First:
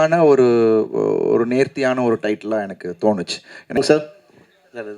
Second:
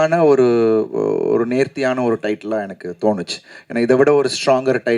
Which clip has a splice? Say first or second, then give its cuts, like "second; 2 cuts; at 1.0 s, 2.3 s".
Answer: first; 1 cut; at 3.8 s